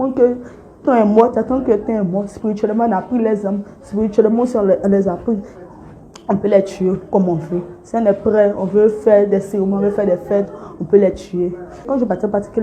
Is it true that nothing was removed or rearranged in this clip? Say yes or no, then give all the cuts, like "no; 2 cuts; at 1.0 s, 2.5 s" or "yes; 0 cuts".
no; 2 cuts; at 5.5 s, 11.9 s